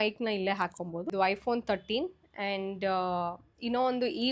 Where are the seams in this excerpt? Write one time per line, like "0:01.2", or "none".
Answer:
0:01.1